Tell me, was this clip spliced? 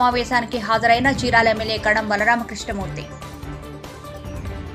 yes; 1 cut; at 3.0 s

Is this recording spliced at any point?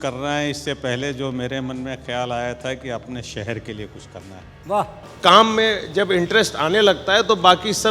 yes; 1 cut; at 5.0 s

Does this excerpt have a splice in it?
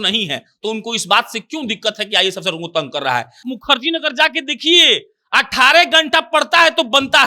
yes; 1 cut; at 3.4 s

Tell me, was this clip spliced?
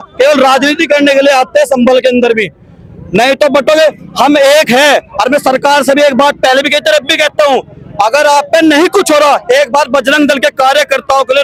no; 0 cuts

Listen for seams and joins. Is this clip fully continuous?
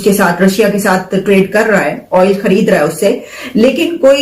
yes; 0 cuts

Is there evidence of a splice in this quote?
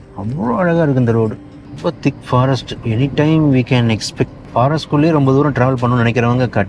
yes; 2 cuts; at 1.6 s, 4.4 s

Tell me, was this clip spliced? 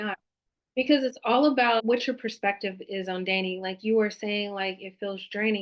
yes; 1 cut; at 1.8 s

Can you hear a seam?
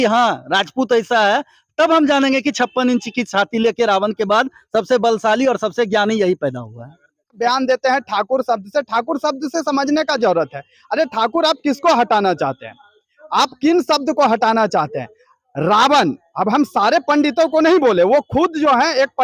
no; 0 cuts

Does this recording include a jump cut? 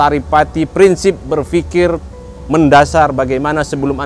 no; 0 cuts

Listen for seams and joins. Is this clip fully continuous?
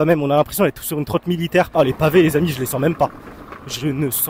no; 1 cut; at 1.7 s

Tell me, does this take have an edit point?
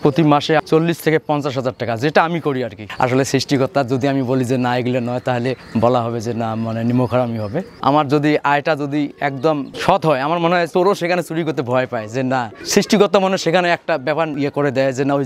yes; 6 cuts; at 2.8 s, 7.7 s, 9.7 s, 10.7 s, 12.6 s, 14.3 s

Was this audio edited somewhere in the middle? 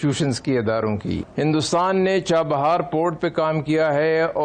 yes; 1 cut; at 1.3 s

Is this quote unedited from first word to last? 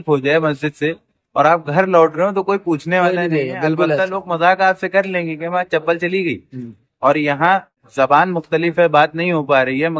no; 1 cut; at 7.8 s

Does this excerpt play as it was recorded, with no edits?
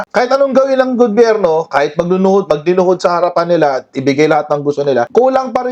yes; 0 cuts

